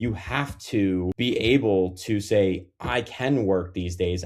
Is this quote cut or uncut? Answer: cut